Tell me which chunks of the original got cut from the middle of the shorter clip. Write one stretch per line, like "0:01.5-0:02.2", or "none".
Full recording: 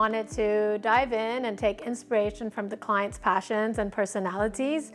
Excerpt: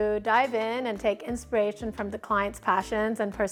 none